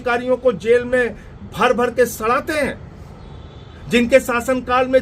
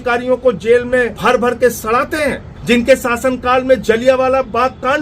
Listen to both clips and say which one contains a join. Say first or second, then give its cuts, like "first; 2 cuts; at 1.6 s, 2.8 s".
second; 2 cuts; at 1.1 s, 2.5 s